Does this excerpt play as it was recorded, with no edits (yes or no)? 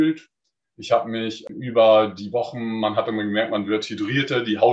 no